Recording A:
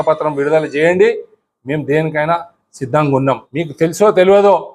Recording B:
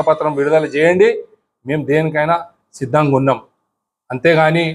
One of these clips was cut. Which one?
A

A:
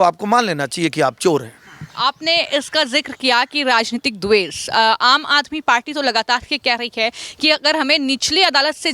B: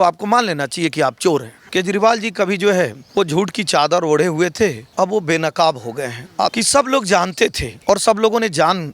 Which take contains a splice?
B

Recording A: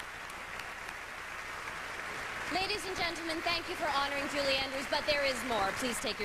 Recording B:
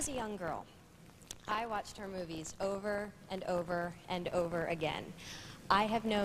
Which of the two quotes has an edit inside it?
B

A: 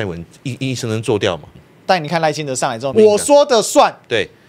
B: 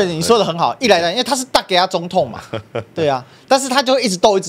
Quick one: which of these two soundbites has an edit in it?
A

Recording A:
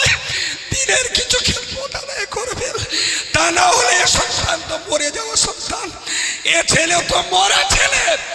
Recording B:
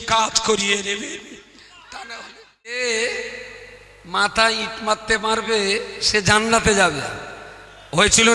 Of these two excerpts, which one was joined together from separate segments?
B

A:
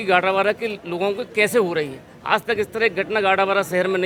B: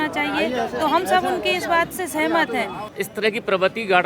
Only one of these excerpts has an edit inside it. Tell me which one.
B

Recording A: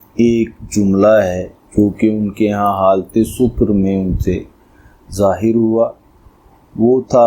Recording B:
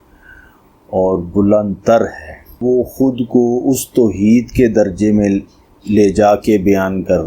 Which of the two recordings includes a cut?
B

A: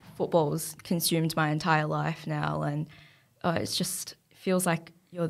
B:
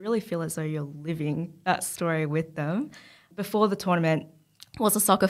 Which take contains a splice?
B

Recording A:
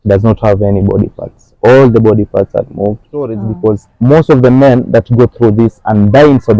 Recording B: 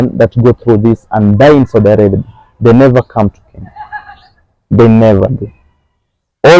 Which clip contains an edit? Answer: A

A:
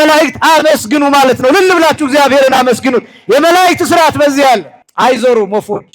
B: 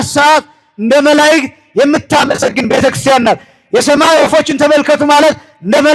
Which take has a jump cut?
A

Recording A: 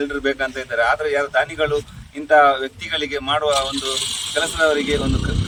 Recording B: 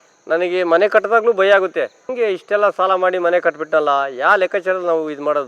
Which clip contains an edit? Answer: B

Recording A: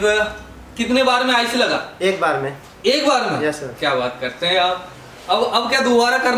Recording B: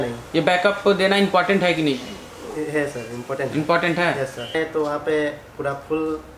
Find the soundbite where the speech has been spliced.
B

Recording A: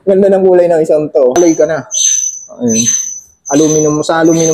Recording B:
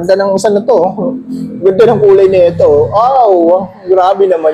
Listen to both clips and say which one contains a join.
A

